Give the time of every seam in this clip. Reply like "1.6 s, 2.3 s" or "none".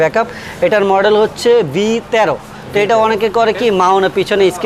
none